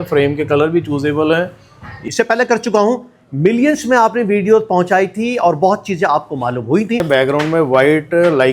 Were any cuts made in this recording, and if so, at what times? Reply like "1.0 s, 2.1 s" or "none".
2.0 s, 7.0 s